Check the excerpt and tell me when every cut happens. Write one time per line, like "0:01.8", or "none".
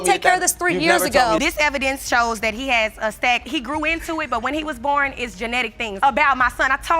0:01.4